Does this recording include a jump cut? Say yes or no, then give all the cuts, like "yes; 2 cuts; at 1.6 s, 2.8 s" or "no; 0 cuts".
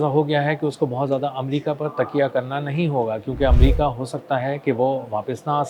no; 0 cuts